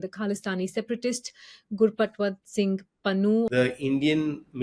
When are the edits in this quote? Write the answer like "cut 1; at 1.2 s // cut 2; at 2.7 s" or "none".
cut 1; at 3.5 s